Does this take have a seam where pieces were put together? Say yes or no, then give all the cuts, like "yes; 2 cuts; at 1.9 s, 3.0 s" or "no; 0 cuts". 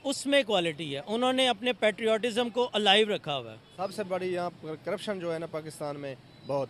yes; 1 cut; at 3.6 s